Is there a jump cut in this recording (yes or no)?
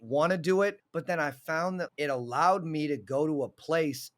yes